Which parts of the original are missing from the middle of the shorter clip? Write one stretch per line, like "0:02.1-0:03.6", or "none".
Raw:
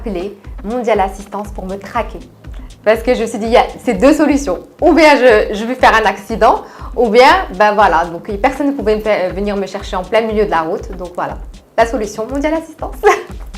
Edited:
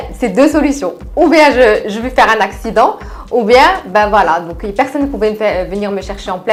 none